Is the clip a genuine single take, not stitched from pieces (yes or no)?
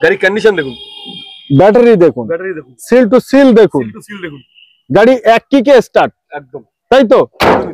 yes